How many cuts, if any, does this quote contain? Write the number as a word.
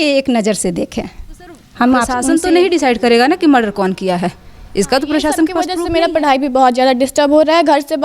two